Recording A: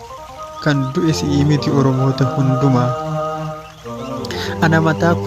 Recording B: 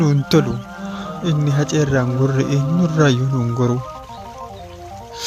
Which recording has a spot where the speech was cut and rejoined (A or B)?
A